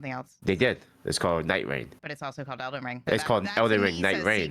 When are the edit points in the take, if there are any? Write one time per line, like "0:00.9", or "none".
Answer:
none